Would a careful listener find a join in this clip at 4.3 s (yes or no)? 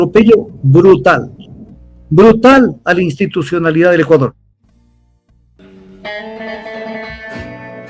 no